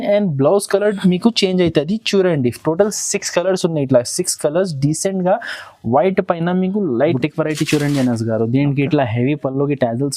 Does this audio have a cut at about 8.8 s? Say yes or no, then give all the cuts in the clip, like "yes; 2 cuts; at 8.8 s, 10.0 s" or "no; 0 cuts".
no; 1 cut; at 7.2 s